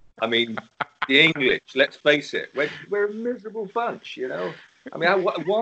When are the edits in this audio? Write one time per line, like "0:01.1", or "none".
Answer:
none

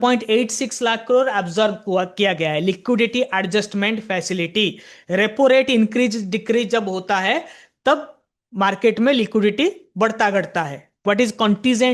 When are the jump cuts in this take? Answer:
0:11.0

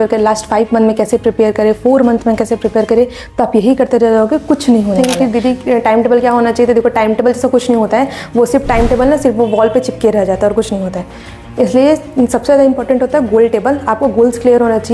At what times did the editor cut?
0:05.0

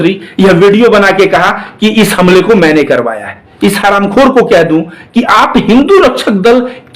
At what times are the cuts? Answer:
0:03.5

